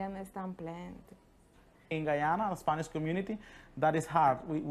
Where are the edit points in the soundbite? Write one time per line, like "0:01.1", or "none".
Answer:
0:01.9